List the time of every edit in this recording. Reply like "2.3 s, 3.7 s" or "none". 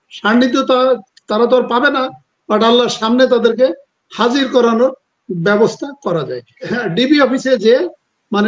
6.7 s